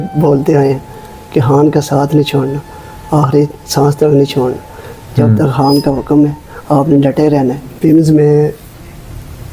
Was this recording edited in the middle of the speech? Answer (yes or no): yes